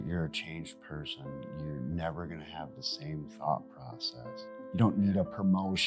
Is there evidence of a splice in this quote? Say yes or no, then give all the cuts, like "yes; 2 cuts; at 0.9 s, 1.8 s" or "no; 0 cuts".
yes; 1 cut; at 4.6 s